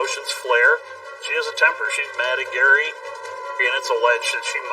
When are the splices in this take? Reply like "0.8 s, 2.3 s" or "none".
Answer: 1.1 s, 3.4 s